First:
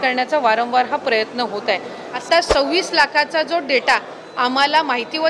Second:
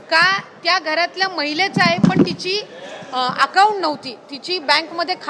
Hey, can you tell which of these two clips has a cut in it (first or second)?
first